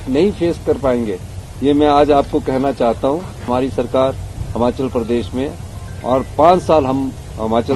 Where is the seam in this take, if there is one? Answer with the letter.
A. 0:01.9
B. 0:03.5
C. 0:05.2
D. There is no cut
B